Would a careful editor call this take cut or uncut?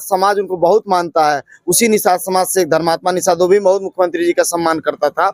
uncut